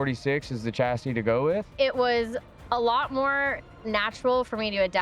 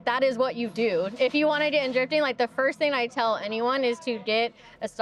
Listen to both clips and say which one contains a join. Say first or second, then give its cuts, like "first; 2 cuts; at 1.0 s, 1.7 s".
first; 1 cut; at 1.7 s